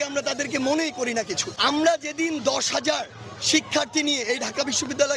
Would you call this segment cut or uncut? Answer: cut